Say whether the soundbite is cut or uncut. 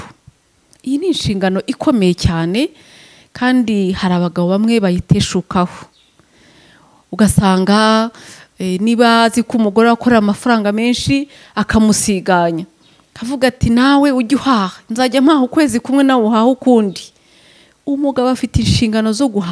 uncut